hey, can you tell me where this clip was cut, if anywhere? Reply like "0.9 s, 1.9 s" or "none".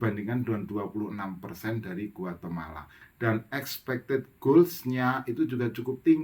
3.0 s